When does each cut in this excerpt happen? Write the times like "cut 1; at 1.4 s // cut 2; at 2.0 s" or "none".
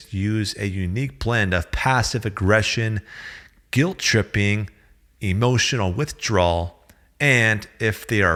none